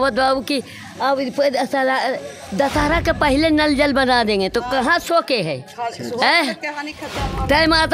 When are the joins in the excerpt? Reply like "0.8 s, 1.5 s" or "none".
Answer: none